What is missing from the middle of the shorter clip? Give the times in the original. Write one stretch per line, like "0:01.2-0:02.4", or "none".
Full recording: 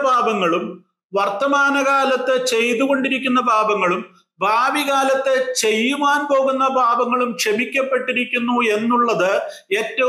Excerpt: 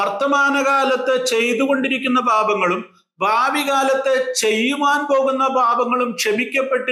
none